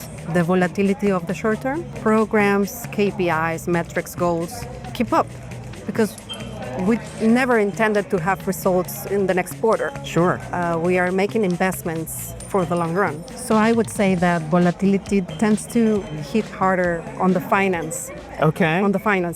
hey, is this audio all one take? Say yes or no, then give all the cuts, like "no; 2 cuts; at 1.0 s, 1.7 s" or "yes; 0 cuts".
no; 4 cuts; at 1.9 s, 4.9 s, 13.3 s, 15.3 s